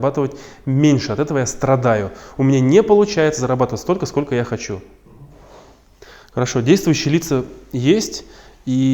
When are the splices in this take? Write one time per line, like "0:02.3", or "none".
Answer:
none